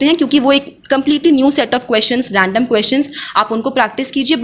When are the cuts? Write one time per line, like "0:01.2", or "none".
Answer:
none